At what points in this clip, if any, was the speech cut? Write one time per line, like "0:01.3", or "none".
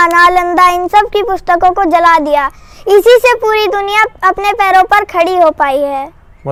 none